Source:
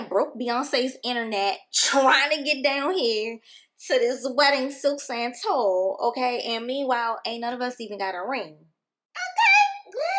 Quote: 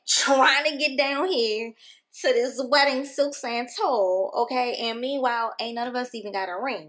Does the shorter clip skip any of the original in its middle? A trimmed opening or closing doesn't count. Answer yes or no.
no